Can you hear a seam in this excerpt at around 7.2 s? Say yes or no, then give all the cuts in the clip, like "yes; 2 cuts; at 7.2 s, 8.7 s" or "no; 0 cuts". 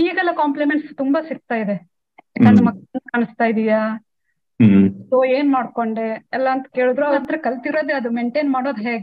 yes; 1 cut; at 7.2 s